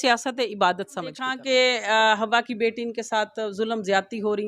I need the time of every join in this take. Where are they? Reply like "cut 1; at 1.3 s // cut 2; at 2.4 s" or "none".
cut 1; at 1.3 s